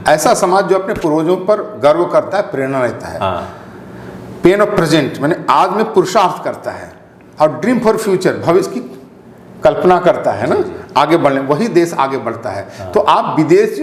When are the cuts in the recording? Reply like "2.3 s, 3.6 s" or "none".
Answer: none